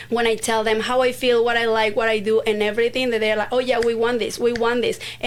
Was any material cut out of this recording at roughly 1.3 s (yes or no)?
no